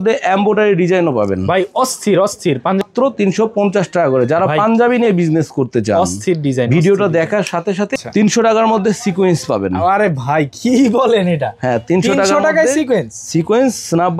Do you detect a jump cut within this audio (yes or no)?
yes